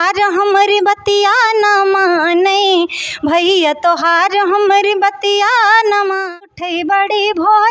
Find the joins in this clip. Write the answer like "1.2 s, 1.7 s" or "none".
6.5 s